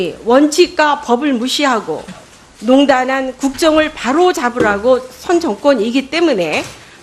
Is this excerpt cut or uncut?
cut